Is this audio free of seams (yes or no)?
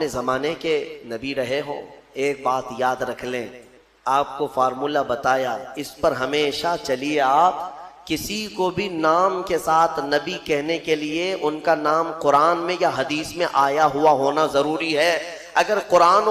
no